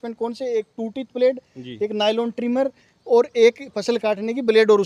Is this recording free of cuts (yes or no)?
yes